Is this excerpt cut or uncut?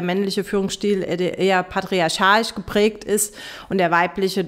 uncut